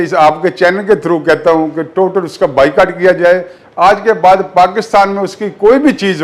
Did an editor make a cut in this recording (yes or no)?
no